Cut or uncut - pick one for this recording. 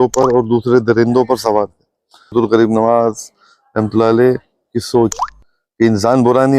cut